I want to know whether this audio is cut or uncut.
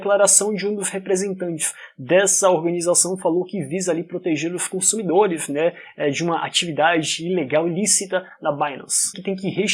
uncut